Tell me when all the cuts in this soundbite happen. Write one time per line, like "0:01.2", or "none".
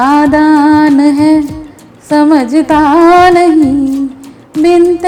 none